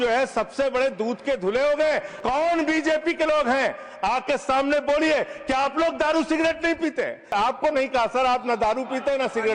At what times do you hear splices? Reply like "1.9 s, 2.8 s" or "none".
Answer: 2.1 s, 7.3 s